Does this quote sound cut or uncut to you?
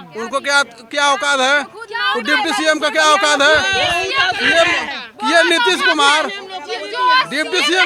uncut